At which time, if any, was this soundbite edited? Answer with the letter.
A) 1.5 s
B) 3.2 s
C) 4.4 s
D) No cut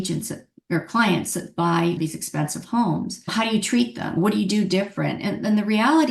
B